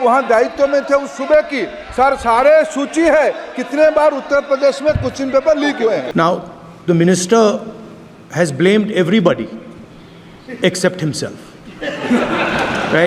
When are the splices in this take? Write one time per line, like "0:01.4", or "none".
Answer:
0:06.1

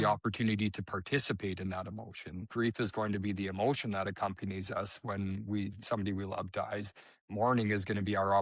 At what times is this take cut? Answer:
0:02.4

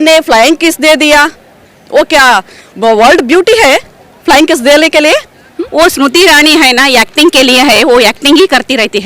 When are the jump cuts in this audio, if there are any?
0:05.6

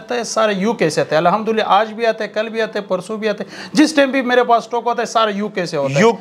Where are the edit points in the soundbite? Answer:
none

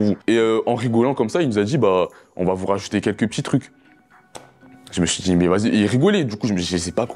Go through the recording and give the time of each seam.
none

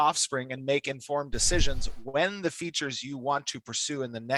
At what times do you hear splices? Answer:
none

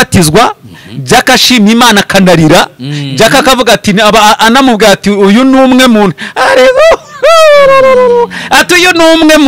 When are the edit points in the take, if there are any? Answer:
none

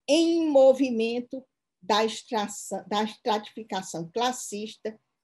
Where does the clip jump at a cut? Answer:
none

